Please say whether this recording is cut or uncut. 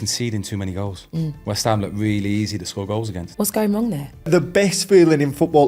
cut